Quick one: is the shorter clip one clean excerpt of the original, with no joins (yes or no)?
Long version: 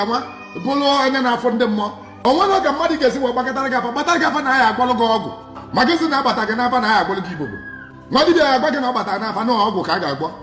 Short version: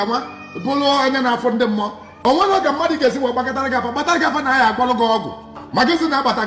yes